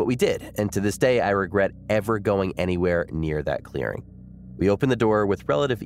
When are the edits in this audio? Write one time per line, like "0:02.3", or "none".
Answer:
none